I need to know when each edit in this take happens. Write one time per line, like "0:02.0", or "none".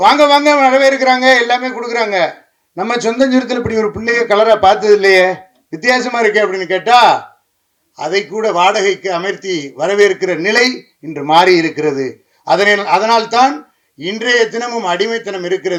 none